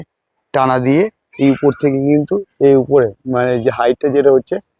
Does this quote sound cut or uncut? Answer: cut